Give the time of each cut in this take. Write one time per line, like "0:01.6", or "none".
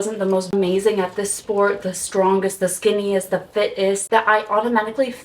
0:04.0